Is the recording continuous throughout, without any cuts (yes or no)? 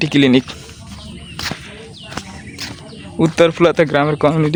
yes